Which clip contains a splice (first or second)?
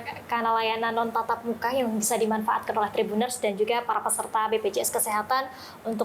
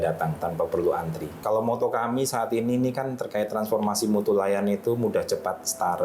second